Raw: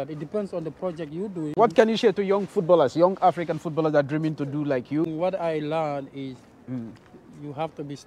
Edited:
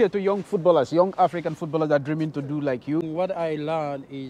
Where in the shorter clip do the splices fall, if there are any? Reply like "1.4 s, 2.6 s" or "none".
none